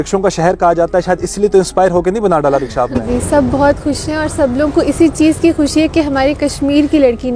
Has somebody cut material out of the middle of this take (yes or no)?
yes